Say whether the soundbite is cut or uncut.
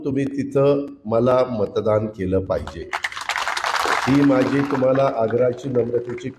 uncut